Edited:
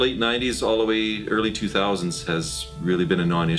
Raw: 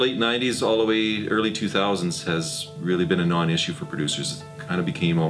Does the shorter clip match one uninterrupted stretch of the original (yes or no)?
yes